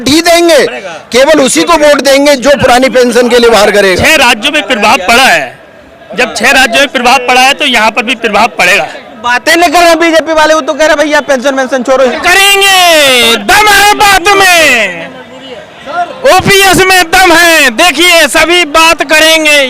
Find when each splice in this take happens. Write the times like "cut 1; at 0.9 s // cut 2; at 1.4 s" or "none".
cut 1; at 4.0 s // cut 2; at 9.1 s // cut 3; at 12.1 s